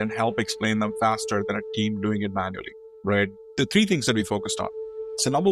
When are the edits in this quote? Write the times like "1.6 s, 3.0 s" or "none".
3.5 s